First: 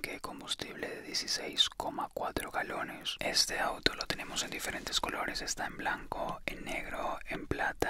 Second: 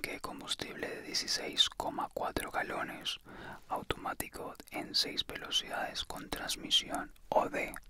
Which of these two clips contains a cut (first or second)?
first